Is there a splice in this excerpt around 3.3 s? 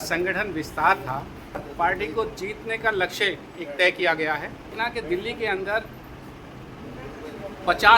no; 2 cuts; at 1.7 s, 4.7 s

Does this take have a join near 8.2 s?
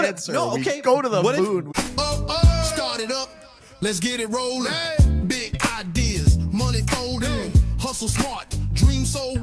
no; 1 cut; at 1.7 s

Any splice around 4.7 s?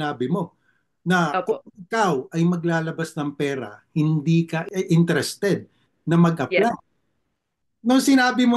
yes; 2 cuts; at 4.7 s, 7.6 s

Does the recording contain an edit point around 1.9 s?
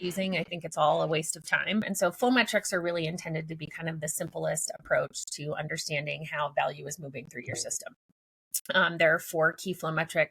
yes; 1 cut; at 1.9 s

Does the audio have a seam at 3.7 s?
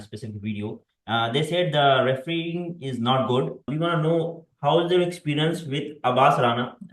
yes; 1 cut; at 3.7 s

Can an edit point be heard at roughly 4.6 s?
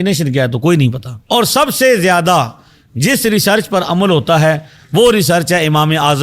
no; 1 cut; at 1.1 s

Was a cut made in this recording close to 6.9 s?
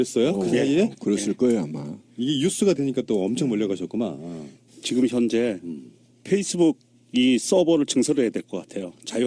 no; 0 cuts

